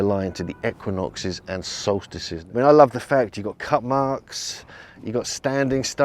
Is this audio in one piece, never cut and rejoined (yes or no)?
no